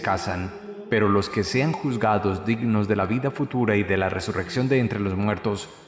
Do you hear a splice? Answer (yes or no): yes